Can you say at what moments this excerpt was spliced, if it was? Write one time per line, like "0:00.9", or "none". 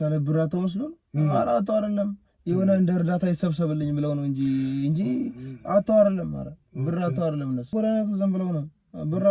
0:07.7